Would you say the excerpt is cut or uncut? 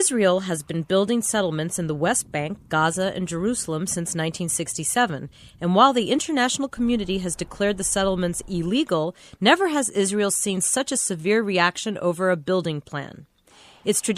cut